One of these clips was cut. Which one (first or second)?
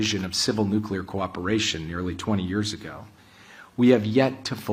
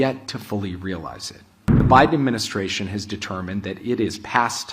second